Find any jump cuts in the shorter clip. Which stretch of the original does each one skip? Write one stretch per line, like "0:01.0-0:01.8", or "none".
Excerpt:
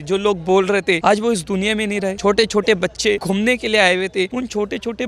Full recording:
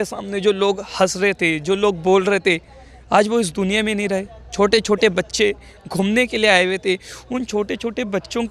0:02.6-0:03.1
0:04.2-0:04.5
0:05.6-0:05.9
0:07.0-0:07.3